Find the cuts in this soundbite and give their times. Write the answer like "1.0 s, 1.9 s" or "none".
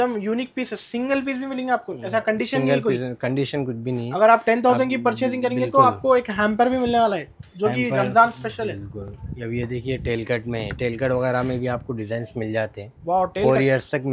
none